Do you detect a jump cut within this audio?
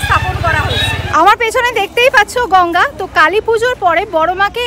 yes; 1 cut; at 1.0 s

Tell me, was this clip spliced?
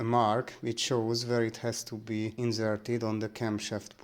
yes; 1 cut; at 2.3 s

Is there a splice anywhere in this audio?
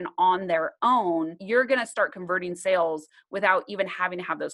yes; 1 cut; at 1.4 s

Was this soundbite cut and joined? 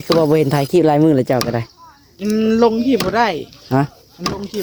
no; 0 cuts

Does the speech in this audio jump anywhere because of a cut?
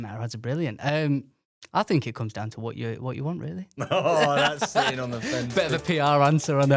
no; 0 cuts

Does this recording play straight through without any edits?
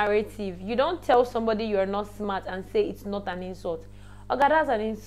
yes; 0 cuts

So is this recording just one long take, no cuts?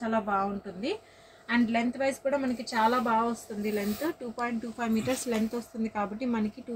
yes; 0 cuts

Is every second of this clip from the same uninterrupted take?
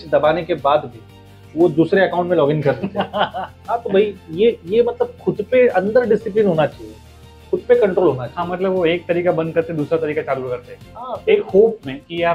yes; 0 cuts

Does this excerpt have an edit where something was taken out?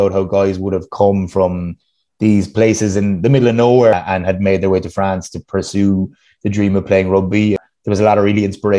yes; 2 cuts; at 3.9 s, 7.6 s

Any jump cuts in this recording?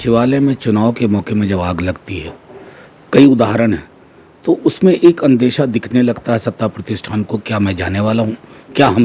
no; 0 cuts

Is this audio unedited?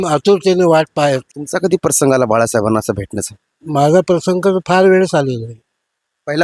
no; 1 cut; at 1.3 s

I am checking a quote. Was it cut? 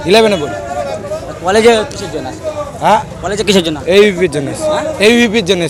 no; 0 cuts

